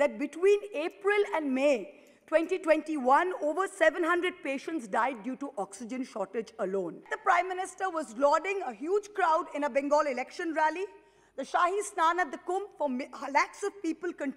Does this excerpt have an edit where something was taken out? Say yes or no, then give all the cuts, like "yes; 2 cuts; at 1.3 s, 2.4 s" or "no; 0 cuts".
yes; 1 cut; at 7.1 s